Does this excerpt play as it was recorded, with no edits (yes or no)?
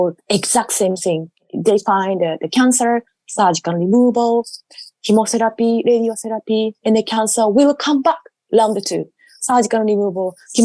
no